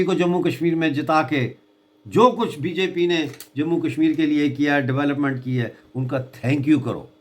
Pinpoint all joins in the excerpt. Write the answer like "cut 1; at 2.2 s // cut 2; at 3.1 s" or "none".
none